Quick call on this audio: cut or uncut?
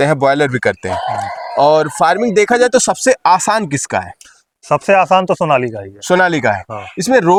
uncut